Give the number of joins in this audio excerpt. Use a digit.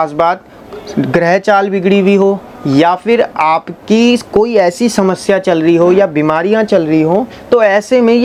0